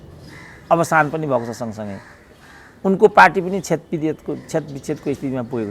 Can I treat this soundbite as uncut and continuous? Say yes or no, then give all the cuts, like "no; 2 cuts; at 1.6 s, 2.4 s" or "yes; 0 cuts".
yes; 0 cuts